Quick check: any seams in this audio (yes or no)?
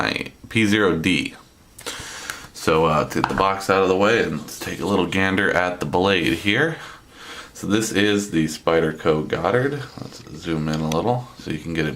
yes